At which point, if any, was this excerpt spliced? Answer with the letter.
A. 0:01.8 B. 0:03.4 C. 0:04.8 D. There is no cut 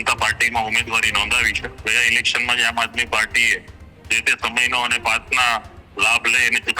A